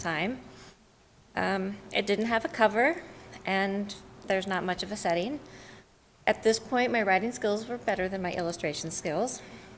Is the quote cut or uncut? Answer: uncut